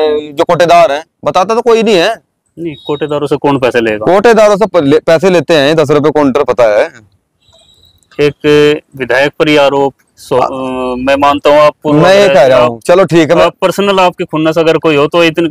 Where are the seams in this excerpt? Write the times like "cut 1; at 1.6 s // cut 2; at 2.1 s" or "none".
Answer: none